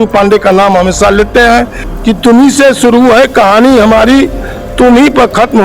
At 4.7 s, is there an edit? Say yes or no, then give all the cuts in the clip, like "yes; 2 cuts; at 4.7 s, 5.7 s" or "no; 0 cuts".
no; 1 cut; at 1.8 s